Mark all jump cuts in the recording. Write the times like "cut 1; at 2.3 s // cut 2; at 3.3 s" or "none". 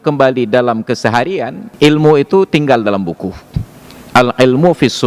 cut 1; at 1.6 s